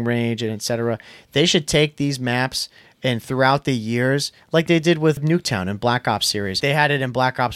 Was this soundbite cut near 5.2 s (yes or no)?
yes